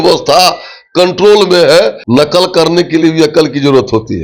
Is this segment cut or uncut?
cut